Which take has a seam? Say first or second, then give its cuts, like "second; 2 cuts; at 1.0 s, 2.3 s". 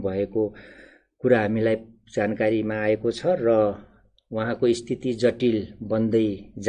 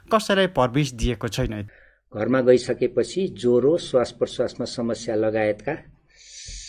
second; 1 cut; at 1.6 s